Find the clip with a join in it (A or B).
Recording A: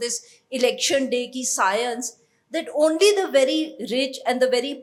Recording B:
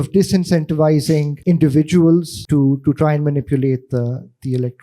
B